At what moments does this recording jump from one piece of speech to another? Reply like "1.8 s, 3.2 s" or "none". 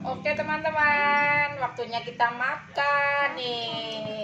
none